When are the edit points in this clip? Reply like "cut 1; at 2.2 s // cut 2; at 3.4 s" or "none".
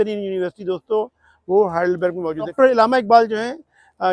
cut 1; at 2.5 s